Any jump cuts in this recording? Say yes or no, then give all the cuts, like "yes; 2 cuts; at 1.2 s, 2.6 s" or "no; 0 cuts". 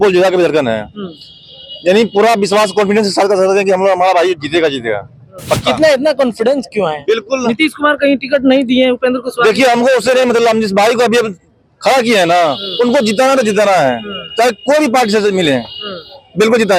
no; 0 cuts